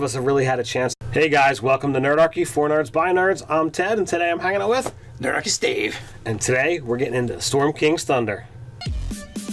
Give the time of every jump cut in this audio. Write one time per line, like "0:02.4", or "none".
none